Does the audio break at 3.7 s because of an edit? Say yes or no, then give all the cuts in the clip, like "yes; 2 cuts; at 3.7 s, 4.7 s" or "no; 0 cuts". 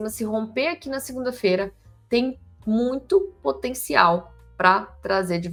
no; 0 cuts